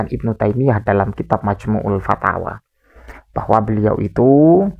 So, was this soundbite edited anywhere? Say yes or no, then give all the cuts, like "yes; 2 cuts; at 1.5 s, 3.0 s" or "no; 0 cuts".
no; 0 cuts